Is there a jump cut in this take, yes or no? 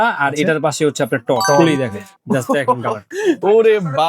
yes